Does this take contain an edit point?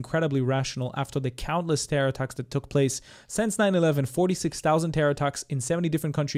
no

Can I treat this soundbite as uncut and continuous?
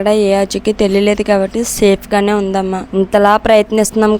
no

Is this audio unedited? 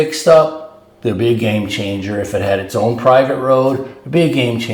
yes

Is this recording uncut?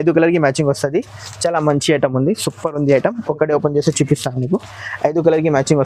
yes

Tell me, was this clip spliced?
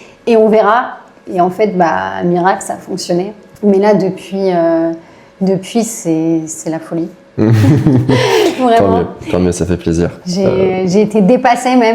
yes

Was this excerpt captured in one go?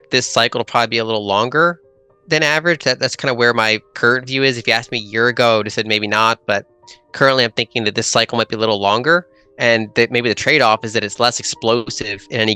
yes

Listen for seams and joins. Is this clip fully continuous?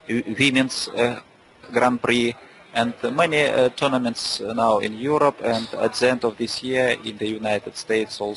yes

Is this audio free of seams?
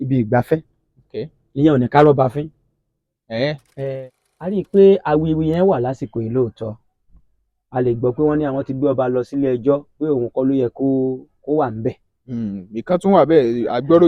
no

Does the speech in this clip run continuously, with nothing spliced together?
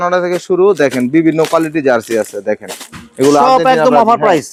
yes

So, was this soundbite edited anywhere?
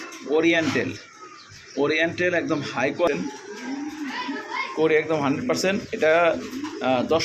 yes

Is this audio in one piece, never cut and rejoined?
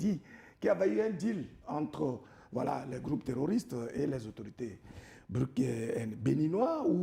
yes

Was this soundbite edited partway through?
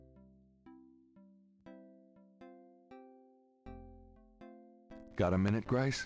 yes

